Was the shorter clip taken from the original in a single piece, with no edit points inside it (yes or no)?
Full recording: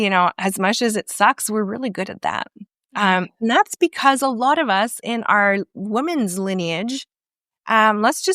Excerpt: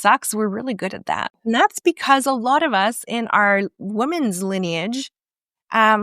no